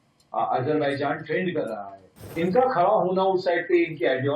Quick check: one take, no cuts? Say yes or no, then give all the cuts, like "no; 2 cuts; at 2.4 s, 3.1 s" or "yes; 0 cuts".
no; 1 cut; at 2.3 s